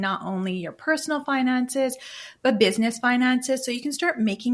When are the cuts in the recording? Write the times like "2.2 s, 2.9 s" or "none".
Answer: none